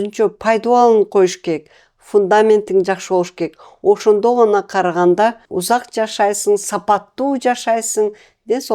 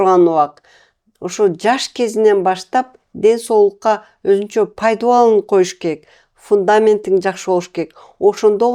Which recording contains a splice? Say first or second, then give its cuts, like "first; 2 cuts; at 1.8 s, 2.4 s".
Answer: first; 1 cut; at 5.5 s